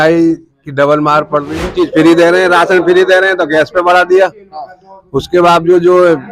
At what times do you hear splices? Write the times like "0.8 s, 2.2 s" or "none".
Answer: 1.7 s